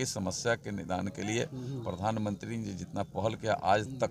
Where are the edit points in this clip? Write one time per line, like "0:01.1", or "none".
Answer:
none